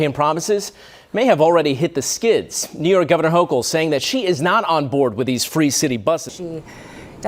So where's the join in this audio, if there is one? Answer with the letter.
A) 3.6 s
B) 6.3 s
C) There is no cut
B